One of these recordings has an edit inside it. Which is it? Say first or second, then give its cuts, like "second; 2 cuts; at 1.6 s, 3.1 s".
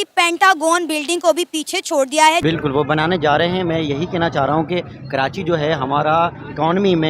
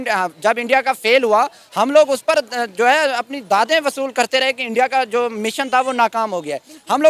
first; 1 cut; at 2.4 s